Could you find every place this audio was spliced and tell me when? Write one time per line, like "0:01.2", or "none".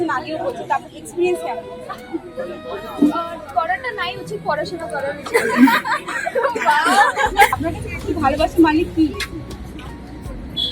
0:07.5